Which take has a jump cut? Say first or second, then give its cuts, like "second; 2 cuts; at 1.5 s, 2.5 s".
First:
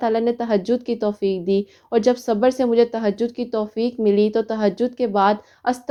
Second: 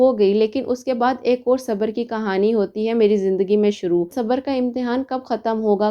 second; 1 cut; at 4.1 s